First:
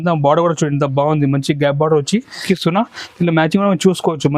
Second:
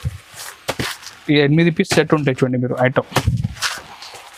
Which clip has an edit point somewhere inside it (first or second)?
first